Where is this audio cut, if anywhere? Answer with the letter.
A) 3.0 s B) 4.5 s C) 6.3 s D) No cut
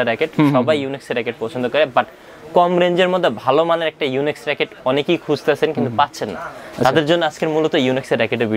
D